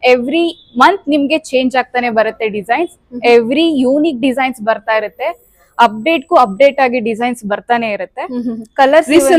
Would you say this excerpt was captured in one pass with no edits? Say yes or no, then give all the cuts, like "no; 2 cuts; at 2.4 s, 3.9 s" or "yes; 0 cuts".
yes; 0 cuts